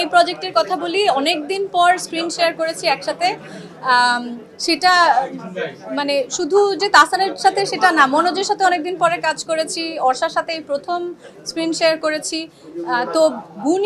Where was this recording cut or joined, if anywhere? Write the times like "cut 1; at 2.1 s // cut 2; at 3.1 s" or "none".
none